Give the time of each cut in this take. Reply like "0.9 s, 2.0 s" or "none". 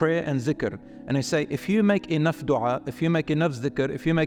none